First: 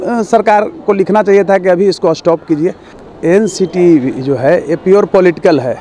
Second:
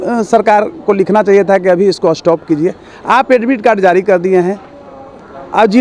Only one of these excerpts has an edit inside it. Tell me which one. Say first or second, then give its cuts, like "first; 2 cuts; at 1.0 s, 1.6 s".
first; 1 cut; at 2.9 s